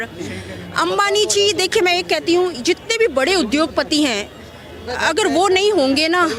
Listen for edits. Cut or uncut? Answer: uncut